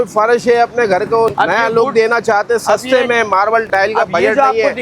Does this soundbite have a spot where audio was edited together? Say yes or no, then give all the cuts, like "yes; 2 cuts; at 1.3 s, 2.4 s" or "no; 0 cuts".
yes; 2 cuts; at 1.3 s, 3.6 s